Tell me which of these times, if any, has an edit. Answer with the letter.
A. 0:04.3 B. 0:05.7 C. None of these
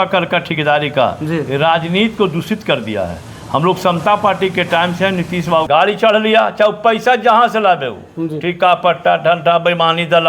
B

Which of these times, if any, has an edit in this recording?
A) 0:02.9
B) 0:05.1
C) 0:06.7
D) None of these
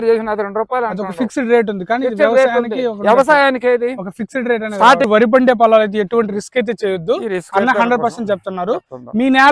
B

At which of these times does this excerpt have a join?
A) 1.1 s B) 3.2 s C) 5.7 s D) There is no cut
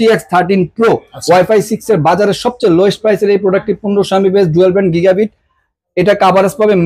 A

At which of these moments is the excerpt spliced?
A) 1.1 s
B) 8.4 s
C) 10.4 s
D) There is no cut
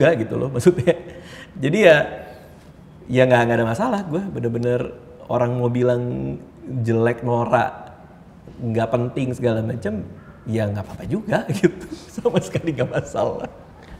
D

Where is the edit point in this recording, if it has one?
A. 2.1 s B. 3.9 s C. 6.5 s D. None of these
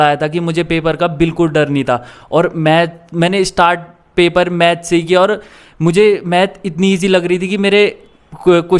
D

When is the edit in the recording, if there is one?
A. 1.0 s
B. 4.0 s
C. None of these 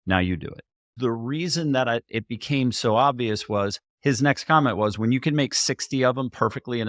A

